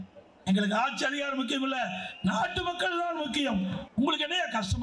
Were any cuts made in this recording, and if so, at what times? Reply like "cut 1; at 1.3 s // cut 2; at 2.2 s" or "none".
cut 1; at 3.8 s